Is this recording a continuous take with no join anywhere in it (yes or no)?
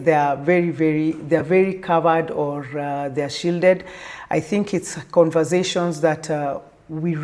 yes